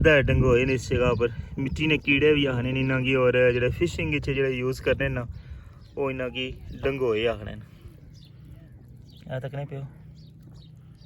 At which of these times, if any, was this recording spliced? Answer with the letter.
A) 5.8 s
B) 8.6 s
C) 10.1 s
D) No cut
D